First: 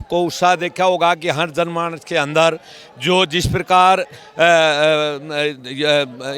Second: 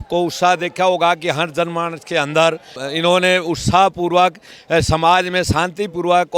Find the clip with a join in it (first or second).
second